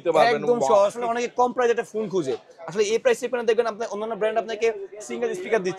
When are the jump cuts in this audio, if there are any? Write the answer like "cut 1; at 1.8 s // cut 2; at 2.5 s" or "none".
cut 1; at 1.0 s